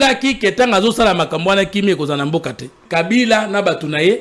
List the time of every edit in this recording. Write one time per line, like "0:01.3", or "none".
0:02.8